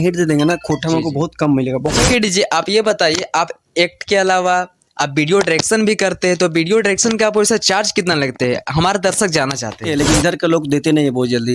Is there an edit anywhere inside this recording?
yes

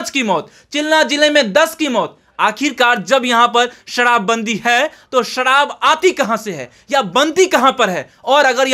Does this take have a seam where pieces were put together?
no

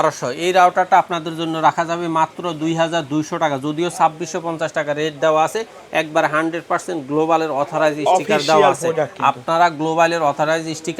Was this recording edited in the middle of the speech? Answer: no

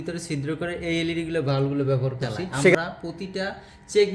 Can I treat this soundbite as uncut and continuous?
no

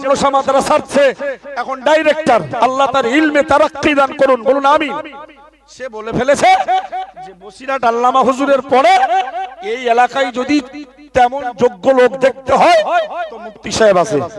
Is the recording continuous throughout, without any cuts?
yes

